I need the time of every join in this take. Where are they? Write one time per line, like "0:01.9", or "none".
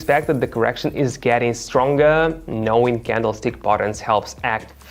none